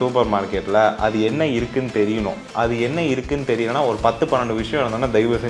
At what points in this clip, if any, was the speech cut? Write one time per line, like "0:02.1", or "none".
none